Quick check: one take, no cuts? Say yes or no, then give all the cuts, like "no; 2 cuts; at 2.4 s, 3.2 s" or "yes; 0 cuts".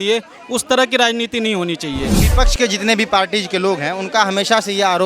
no; 1 cut; at 2.2 s